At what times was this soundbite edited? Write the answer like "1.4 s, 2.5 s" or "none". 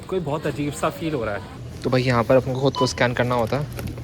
1.6 s